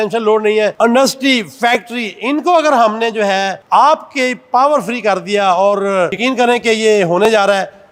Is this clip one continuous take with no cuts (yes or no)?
yes